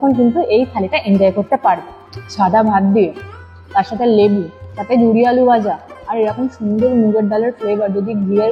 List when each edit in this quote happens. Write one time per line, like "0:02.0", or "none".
0:01.9